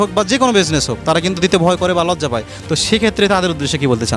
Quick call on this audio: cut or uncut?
uncut